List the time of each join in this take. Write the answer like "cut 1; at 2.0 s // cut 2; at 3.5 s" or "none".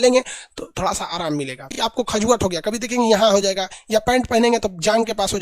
cut 1; at 1.8 s